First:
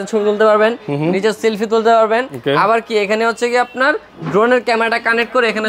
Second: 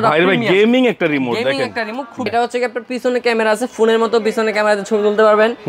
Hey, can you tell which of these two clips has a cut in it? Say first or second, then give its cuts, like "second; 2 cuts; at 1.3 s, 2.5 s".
second; 1 cut; at 2.3 s